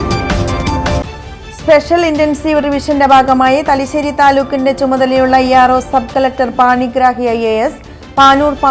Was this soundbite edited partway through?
no; 0 cuts

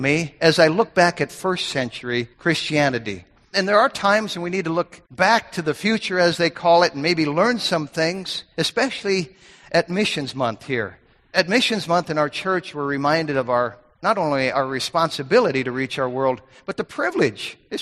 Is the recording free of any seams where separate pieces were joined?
no; 4 cuts; at 2.3 s, 3.5 s, 5.0 s, 11.3 s

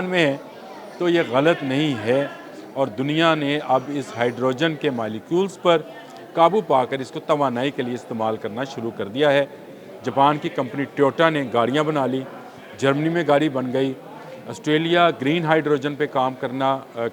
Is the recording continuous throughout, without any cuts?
yes; 0 cuts

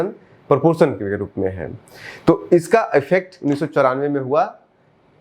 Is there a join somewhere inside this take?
no; 0 cuts

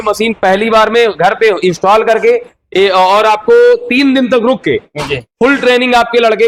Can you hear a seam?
no; 0 cuts

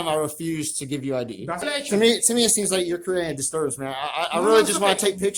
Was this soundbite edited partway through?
yes; 1 cut; at 1.7 s

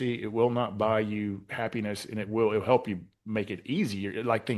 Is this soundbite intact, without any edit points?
yes; 0 cuts

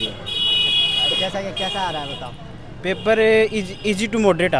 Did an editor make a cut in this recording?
no; 0 cuts

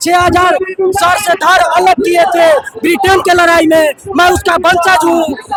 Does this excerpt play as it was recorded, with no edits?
yes; 0 cuts

